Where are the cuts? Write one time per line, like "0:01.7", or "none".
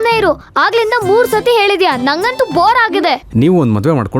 0:03.2